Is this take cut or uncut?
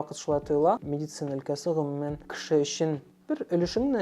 cut